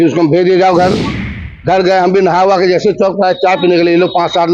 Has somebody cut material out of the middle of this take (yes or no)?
no